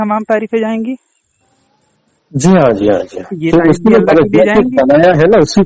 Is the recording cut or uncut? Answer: uncut